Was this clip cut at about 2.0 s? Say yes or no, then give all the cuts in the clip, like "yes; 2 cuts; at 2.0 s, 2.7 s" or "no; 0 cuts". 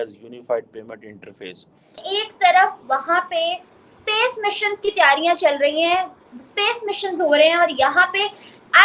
yes; 1 cut; at 2.0 s